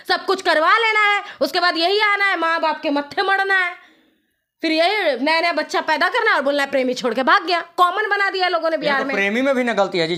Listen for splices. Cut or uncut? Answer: uncut